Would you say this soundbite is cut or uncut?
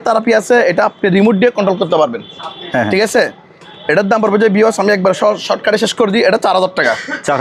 uncut